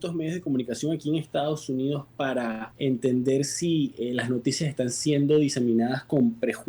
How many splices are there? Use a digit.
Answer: 1